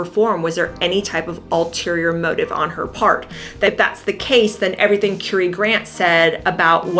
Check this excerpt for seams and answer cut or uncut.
cut